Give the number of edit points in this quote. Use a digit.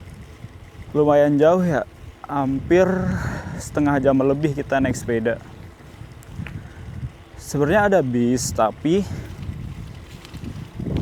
0